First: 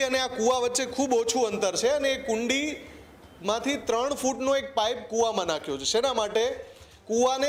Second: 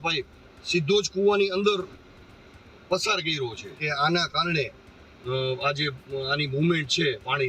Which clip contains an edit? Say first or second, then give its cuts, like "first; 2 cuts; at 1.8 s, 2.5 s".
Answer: second; 1 cut; at 3.8 s